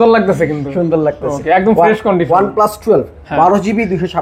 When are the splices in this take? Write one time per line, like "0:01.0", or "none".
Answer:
none